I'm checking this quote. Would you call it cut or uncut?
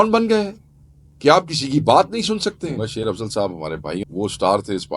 cut